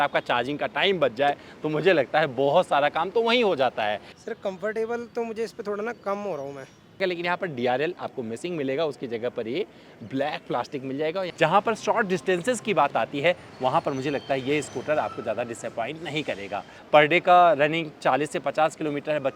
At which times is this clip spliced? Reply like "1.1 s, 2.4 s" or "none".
4.1 s, 7.0 s, 11.3 s, 16.7 s